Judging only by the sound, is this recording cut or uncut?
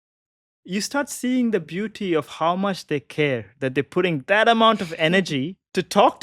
uncut